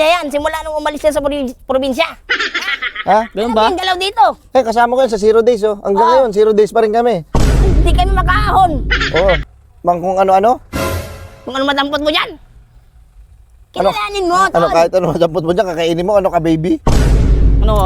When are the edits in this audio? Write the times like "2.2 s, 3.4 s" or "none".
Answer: 9.4 s

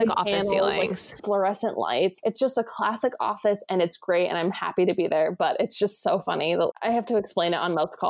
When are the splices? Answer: 1.2 s, 2.2 s

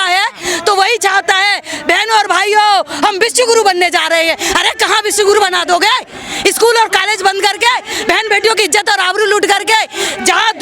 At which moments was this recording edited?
none

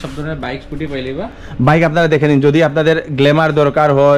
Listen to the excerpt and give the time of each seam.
none

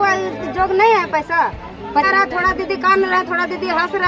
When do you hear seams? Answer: 2.1 s

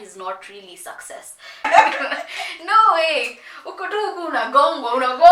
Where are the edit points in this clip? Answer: 1.6 s

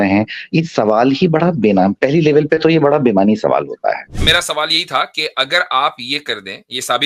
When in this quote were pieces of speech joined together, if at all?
4.2 s

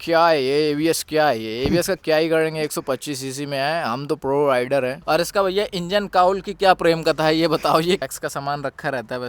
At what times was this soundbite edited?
5.0 s, 8.0 s

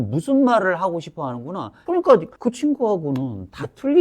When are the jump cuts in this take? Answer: 1.8 s

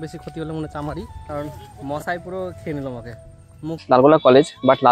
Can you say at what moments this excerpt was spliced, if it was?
1.2 s, 3.8 s

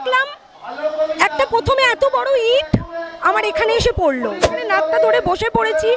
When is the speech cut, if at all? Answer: 4.5 s

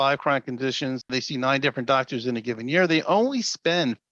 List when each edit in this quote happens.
1.0 s

